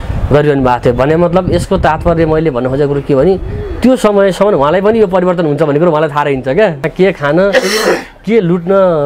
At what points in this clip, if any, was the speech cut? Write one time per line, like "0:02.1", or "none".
0:06.9